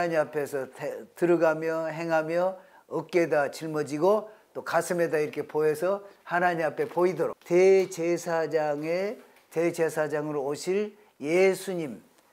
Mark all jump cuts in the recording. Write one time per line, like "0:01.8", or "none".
0:07.4

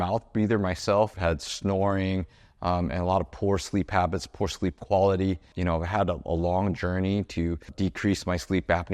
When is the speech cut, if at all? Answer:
0:01.1
0:05.5
0:07.7

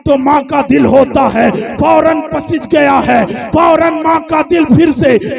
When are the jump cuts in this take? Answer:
none

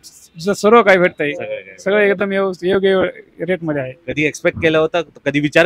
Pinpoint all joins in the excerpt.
none

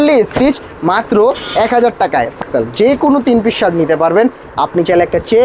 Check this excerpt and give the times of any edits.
0:02.4

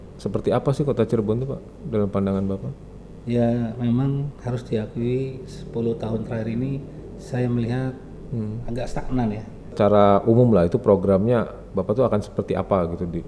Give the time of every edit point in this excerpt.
0:09.7

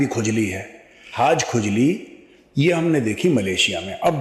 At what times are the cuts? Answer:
0:01.1

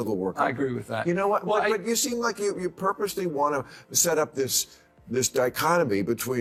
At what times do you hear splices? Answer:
none

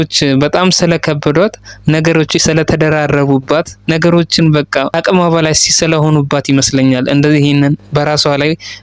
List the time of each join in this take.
0:03.7
0:04.9

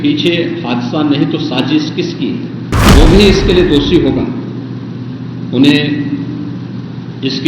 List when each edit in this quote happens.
0:02.7

